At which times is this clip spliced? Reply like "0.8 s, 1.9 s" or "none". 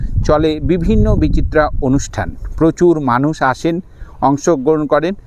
none